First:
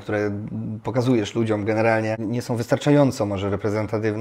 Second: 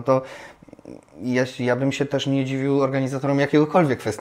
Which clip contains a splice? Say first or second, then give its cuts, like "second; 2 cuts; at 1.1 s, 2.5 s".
first; 1 cut; at 2.2 s